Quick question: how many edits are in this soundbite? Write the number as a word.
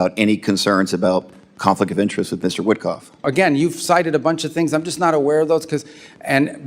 one